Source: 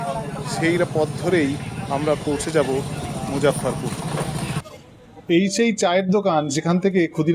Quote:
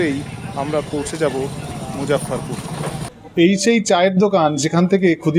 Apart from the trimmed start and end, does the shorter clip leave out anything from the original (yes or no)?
yes